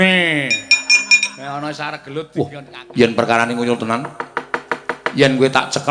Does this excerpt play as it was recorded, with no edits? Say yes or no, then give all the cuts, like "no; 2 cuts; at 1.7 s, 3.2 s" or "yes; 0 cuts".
no; 1 cut; at 2.3 s